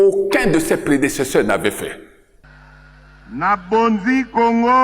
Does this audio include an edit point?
yes; 1 cut; at 2.4 s

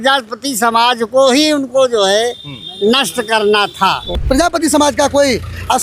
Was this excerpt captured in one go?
no; 1 cut; at 4.2 s

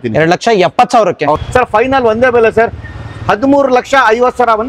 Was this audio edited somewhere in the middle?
yes; 1 cut; at 1.3 s

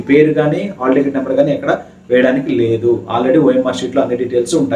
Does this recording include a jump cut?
no; 0 cuts

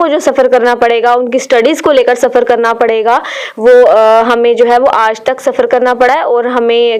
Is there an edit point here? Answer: no; 0 cuts

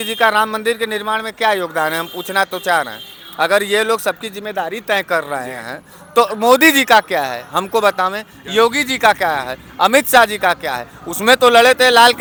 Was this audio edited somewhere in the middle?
no; 0 cuts

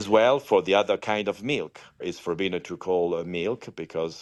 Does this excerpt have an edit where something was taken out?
no; 0 cuts

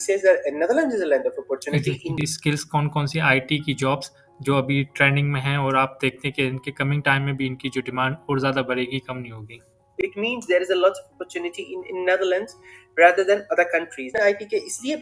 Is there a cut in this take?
yes; 3 cuts; at 2.3 s, 9.9 s, 14.1 s

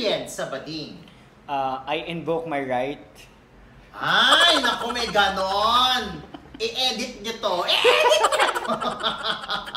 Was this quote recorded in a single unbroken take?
yes; 0 cuts

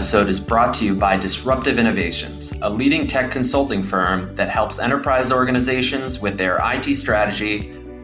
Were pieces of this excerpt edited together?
no; 0 cuts

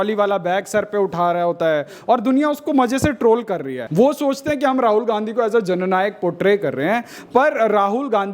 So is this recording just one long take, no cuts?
no; 1 cut; at 3.8 s

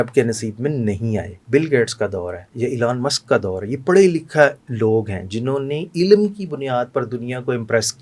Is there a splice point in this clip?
yes; 1 cut; at 1.4 s

